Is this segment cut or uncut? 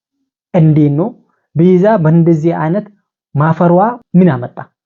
cut